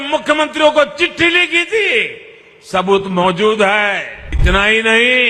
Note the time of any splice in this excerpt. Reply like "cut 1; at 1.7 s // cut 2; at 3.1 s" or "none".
cut 1; at 4.4 s